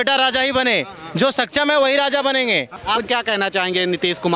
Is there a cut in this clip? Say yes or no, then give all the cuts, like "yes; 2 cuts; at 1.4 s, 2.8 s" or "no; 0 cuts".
yes; 1 cut; at 2.7 s